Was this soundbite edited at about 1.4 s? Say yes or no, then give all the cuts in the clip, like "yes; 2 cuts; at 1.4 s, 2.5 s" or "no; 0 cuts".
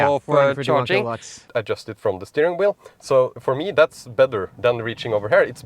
yes; 1 cut; at 1.4 s